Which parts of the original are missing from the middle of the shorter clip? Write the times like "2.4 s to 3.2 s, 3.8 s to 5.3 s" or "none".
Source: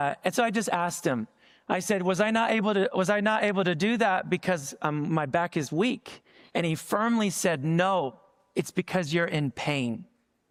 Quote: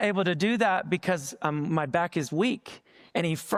none